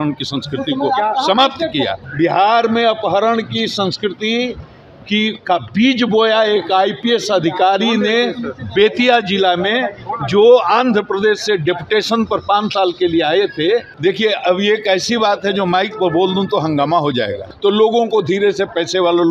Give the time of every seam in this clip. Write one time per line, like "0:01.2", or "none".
0:02.0
0:13.9
0:17.4